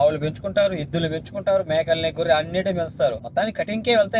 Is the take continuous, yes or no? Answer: no